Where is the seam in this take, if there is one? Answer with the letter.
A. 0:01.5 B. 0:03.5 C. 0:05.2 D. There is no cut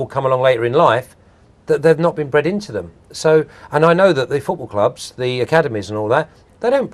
A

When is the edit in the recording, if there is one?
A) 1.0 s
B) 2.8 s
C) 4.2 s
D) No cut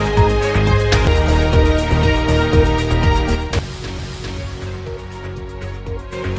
A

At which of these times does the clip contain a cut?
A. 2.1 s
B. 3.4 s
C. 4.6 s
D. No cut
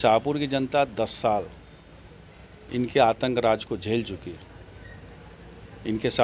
D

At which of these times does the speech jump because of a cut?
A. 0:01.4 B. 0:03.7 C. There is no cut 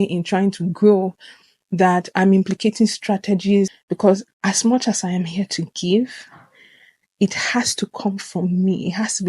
B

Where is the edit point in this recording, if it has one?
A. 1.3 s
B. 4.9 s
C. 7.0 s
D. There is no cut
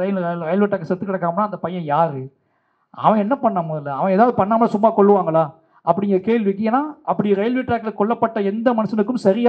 D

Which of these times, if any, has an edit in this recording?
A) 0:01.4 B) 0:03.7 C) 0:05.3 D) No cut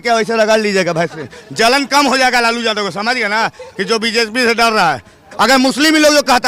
C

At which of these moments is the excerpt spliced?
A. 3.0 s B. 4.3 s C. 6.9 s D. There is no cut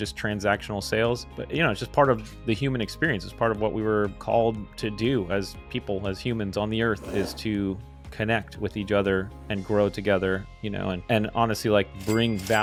D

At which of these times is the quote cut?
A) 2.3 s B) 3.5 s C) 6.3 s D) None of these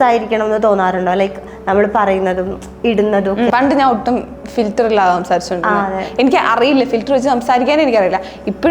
B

